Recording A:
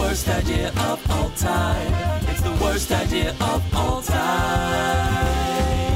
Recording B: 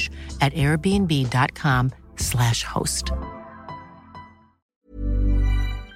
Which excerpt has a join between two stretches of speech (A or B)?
B